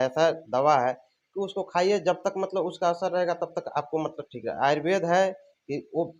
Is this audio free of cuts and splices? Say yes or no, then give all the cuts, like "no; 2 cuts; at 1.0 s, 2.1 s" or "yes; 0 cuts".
yes; 0 cuts